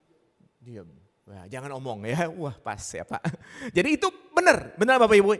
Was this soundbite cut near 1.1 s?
no; 0 cuts

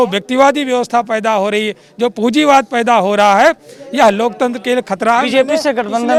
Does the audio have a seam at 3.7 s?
no; 0 cuts

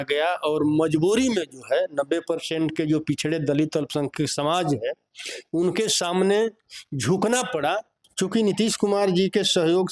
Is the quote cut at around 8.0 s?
yes; 1 cut; at 8.0 s

